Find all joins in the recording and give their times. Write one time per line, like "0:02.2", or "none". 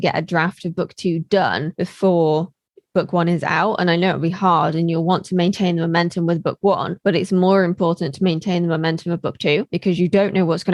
none